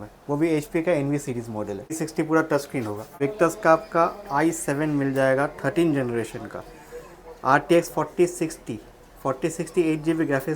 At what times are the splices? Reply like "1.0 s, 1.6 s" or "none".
2.0 s, 3.0 s